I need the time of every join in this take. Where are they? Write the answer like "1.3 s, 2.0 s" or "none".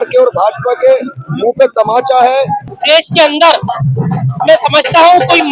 2.7 s